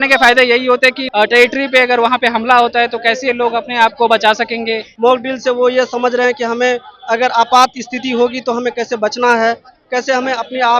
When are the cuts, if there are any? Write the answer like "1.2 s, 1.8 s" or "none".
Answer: 1.0 s, 4.9 s